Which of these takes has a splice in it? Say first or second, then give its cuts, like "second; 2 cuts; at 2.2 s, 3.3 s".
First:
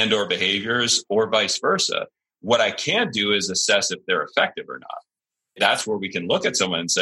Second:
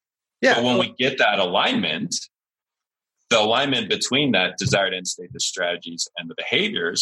first; 1 cut; at 5.5 s